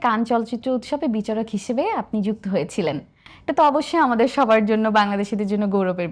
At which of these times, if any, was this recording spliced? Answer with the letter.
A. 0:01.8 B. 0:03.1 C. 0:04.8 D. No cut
D